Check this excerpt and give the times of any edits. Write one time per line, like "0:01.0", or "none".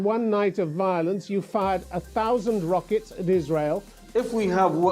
0:04.0

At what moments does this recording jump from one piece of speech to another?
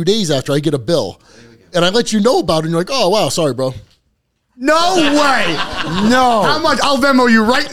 none

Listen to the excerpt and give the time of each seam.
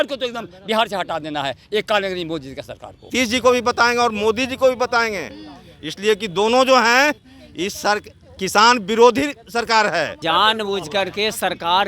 0:03.1
0:10.2

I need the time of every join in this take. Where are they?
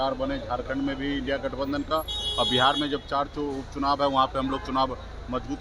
none

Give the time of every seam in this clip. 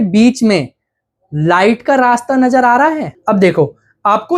0:03.1

